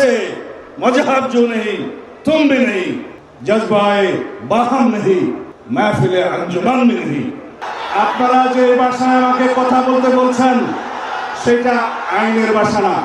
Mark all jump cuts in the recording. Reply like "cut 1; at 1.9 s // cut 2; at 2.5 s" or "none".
cut 1; at 5.5 s // cut 2; at 7.5 s